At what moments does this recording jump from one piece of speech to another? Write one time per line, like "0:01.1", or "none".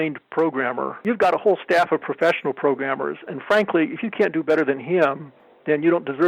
0:00.9